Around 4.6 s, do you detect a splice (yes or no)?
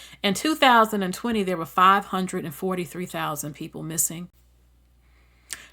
yes